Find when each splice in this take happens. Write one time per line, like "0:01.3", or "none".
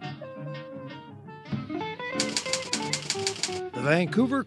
0:01.1